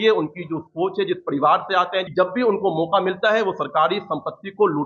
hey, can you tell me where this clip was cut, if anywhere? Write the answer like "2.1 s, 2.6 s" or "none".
2.1 s